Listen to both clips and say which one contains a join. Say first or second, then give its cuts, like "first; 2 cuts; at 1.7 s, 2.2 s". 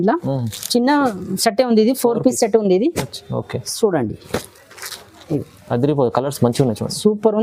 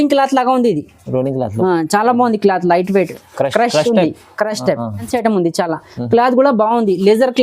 second; 1 cut; at 5.1 s